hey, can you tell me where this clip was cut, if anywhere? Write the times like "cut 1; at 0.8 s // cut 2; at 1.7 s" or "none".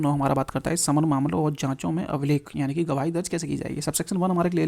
none